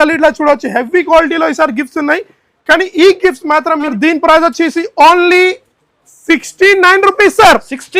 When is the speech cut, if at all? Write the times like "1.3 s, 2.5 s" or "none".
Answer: 3.9 s